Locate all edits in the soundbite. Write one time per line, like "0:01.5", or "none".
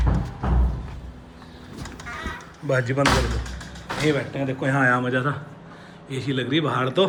none